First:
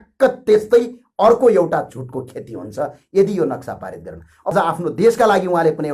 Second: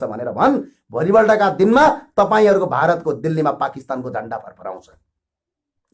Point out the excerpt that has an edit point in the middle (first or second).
first